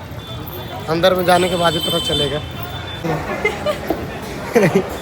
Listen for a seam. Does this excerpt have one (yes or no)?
yes